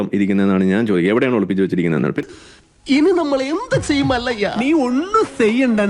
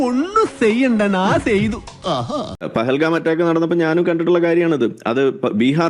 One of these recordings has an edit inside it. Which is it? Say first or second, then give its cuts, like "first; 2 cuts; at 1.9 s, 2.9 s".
second; 1 cut; at 2.6 s